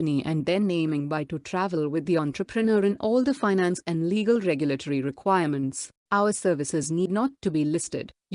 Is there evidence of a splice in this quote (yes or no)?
yes